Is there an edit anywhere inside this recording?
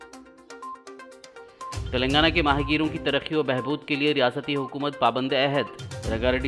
yes; 1 cut; at 1.2 s

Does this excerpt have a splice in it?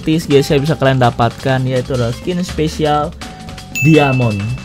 no; 0 cuts

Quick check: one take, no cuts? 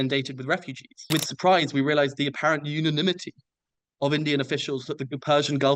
no; 1 cut; at 1.0 s

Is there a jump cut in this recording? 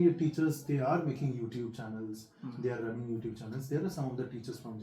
no; 0 cuts

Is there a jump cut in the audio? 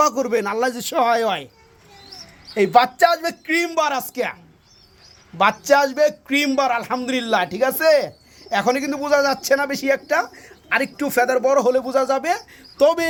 no; 0 cuts

